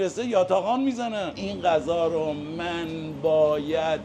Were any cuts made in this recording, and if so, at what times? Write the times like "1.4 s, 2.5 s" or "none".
1.4 s